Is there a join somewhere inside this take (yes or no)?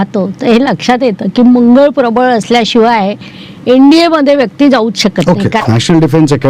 yes